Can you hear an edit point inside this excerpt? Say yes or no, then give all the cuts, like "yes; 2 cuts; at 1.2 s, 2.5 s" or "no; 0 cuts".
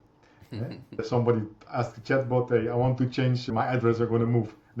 yes; 2 cuts; at 1.0 s, 3.5 s